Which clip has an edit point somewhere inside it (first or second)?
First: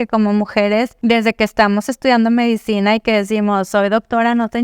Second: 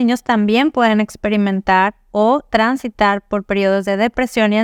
first